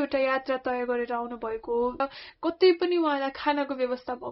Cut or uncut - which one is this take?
cut